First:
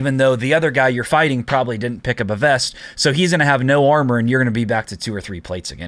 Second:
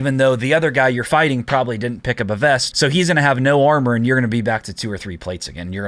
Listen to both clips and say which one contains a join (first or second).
second